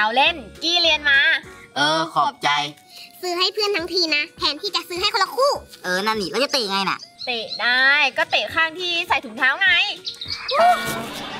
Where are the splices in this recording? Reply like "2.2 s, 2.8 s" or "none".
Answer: none